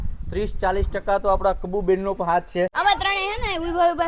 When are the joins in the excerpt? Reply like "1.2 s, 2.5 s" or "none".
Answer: 2.7 s